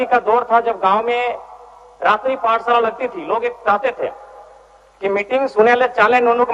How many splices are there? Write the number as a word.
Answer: zero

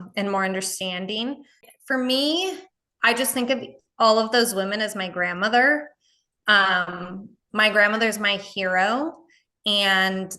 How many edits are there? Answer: one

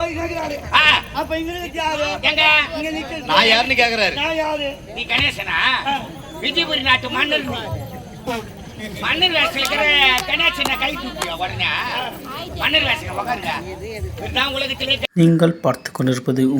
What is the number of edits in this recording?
one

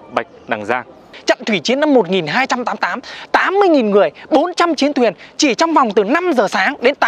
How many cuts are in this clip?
one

